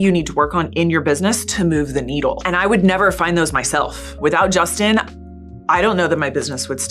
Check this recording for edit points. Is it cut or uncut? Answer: cut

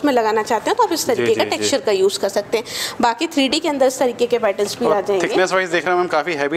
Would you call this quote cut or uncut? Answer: uncut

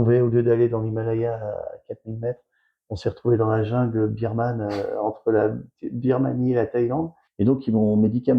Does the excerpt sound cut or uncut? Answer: cut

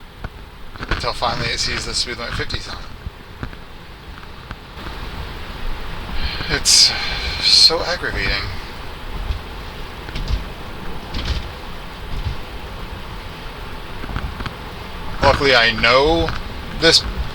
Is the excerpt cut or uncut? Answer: uncut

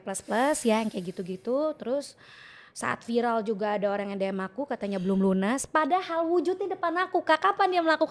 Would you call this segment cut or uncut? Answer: uncut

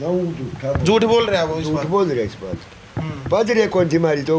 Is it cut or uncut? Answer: uncut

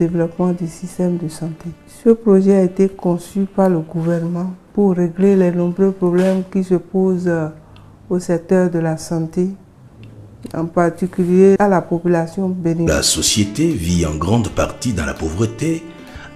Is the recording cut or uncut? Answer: uncut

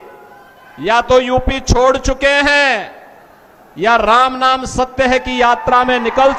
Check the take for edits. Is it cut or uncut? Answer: uncut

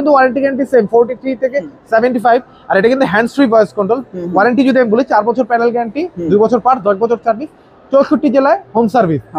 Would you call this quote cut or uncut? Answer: uncut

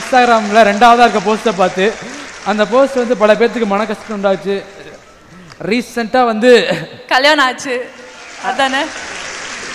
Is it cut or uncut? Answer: uncut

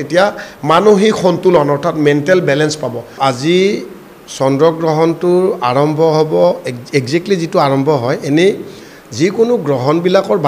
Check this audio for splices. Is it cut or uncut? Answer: uncut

